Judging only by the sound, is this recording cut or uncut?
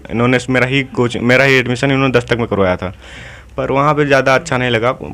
uncut